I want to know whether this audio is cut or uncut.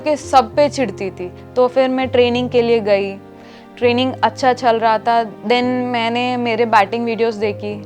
uncut